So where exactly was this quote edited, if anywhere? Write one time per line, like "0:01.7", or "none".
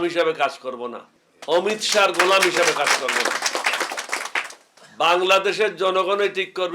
none